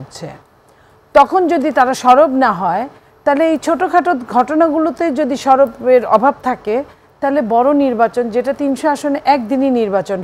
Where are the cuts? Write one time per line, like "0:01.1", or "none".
none

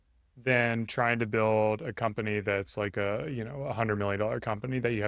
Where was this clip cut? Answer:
none

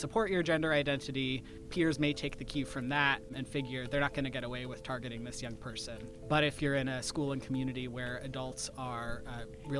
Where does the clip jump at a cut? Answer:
0:01.6
0:03.3
0:06.1

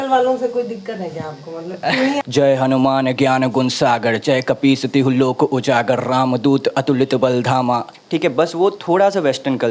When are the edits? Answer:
0:02.2
0:08.0

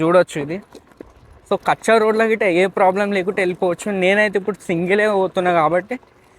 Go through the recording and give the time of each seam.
0:01.0

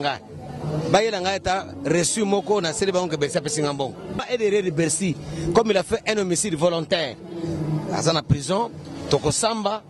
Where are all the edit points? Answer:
0:04.1

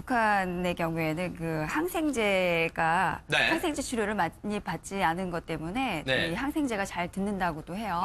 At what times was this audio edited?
0:04.8

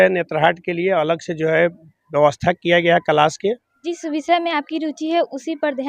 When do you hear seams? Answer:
0:03.7

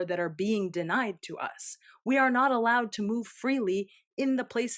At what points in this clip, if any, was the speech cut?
none

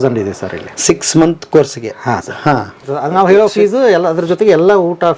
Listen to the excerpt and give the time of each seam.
0:02.9

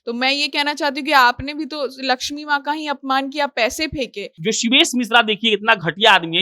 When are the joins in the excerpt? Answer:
0:04.3

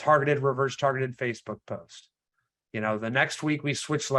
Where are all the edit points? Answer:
none

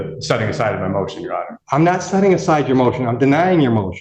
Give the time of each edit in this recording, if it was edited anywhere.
0:01.5

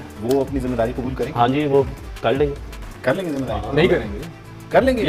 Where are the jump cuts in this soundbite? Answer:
none

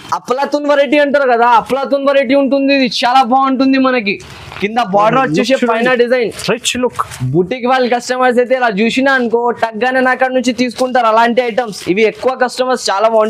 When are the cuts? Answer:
none

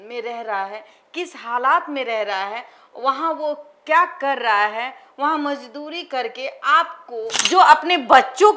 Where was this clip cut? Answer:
0:07.3

